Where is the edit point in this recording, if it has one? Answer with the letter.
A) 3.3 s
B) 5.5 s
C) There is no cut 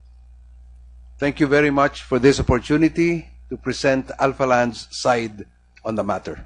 B